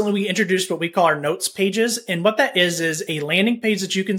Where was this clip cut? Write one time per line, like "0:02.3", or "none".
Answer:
none